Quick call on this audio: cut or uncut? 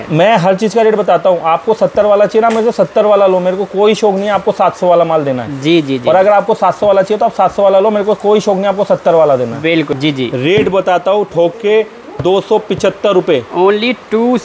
cut